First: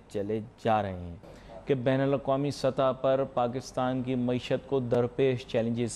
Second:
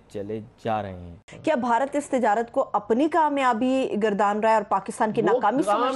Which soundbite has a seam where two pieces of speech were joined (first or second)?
second